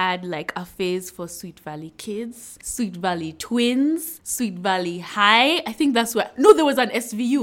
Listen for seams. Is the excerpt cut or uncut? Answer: uncut